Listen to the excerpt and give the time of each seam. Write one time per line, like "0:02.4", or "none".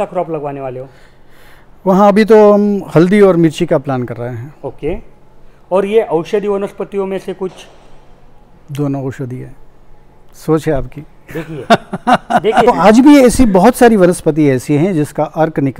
0:12.7